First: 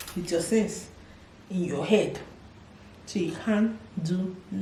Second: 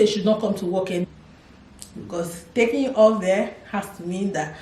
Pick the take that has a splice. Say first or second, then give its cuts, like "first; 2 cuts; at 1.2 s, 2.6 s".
second; 1 cut; at 1.0 s